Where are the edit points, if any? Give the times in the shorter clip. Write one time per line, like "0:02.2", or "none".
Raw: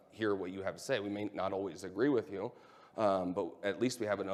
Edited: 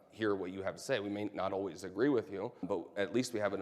0:02.6